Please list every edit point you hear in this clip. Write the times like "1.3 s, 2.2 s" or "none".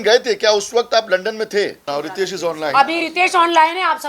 1.8 s

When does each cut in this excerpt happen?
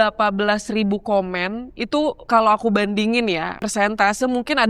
2.2 s, 3.6 s

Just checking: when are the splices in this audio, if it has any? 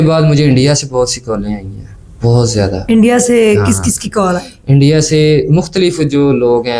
none

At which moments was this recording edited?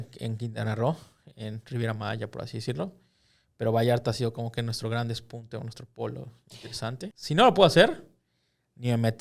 7.2 s

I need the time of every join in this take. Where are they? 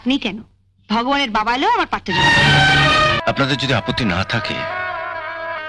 3.2 s

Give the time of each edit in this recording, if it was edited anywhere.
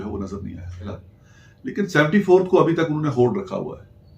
1.1 s

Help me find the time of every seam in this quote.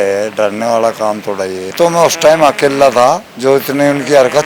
1.7 s, 3.3 s

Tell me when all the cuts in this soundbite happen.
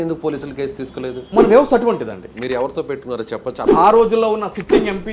2.3 s, 3.6 s

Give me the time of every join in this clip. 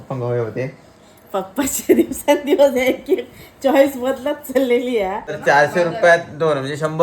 5.3 s

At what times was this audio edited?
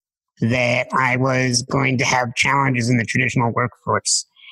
none

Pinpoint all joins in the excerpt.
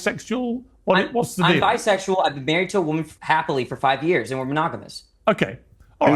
1.1 s

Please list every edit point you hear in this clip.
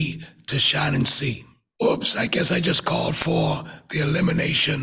1.6 s

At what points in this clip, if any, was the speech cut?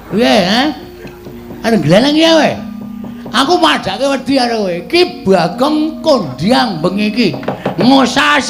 none

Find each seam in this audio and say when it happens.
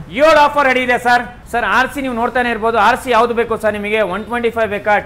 1.4 s

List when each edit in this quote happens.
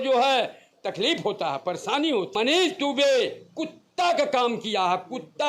2.3 s

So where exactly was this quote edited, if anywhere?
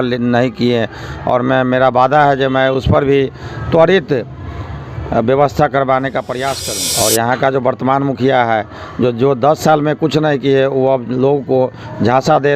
6.6 s

